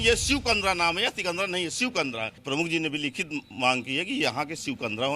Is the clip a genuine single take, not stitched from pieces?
no; 1 cut; at 2.4 s

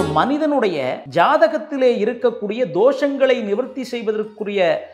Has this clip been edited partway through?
yes; 1 cut; at 1.0 s

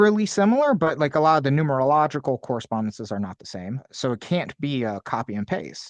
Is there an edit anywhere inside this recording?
yes; 1 cut; at 3.9 s

